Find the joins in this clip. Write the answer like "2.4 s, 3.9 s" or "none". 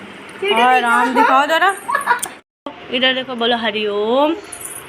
2.4 s